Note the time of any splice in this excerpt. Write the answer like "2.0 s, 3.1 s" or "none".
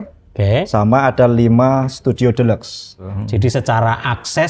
3.2 s